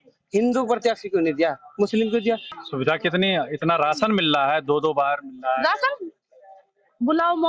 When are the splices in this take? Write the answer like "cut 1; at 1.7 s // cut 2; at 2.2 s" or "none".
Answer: cut 1; at 2.5 s